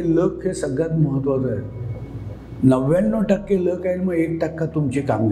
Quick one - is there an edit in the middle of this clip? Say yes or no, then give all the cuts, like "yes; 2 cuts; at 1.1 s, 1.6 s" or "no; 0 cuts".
no; 0 cuts